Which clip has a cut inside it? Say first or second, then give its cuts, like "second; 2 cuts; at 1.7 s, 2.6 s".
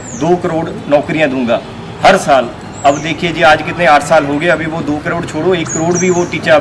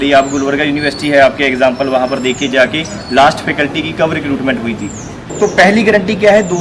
second; 1 cut; at 5.2 s